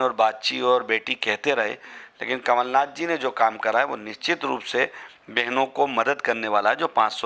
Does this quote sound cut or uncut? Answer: uncut